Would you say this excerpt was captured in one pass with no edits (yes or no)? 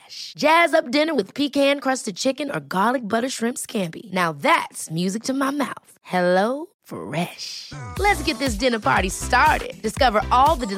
yes